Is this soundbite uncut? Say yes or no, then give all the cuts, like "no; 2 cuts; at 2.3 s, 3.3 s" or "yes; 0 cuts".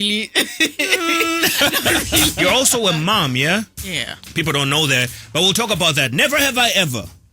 no; 1 cut; at 2.3 s